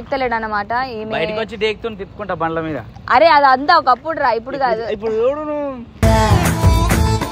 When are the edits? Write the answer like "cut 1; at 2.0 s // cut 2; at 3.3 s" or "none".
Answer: none